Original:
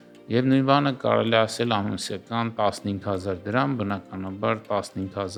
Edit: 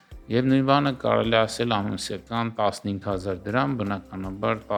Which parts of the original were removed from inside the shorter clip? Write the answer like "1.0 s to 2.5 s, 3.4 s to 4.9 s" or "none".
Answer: none